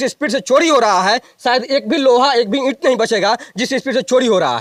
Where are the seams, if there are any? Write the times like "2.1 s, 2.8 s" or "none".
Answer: none